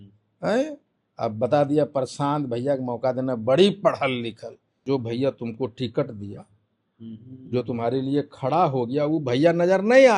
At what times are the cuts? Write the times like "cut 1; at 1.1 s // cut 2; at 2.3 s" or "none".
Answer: cut 1; at 4.8 s